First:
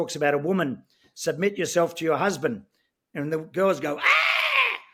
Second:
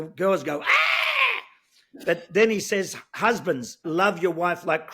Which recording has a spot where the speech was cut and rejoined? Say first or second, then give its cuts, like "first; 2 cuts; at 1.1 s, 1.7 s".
second; 1 cut; at 3.8 s